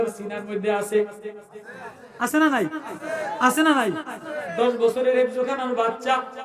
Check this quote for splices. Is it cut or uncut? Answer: uncut